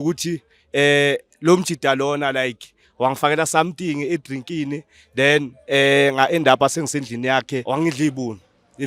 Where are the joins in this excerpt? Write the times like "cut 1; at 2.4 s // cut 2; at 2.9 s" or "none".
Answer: cut 1; at 7.6 s